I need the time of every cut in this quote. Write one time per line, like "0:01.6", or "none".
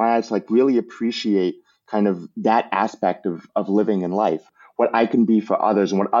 0:04.5